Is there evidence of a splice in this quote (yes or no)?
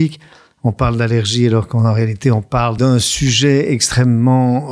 yes